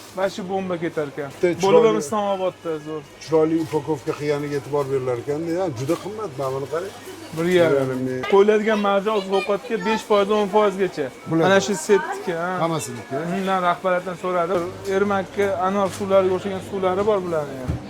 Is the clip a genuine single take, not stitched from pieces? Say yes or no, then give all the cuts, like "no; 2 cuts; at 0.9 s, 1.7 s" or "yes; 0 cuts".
no; 3 cuts; at 1.4 s, 8.2 s, 14.6 s